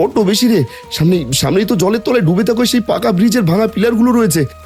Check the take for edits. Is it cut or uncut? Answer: uncut